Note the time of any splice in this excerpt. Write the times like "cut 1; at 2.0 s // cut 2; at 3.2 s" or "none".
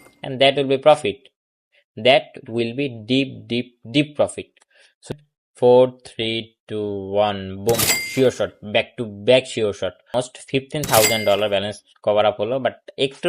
cut 1; at 5.0 s // cut 2; at 10.1 s